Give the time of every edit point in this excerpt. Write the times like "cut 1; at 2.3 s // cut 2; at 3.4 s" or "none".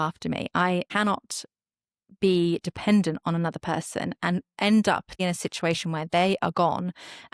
cut 1; at 0.9 s // cut 2; at 5.2 s